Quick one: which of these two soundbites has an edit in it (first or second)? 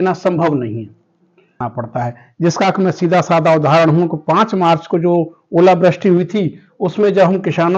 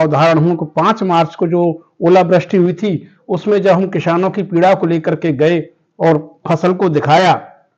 first